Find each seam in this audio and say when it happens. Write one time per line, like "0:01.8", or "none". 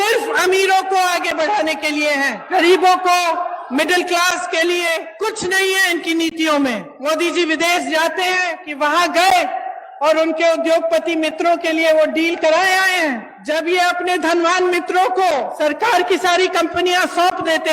0:02.4
0:05.1
0:06.9
0:08.6
0:13.4
0:15.5